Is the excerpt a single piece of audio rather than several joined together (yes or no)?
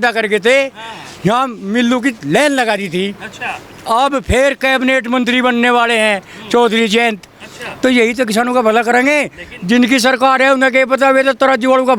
yes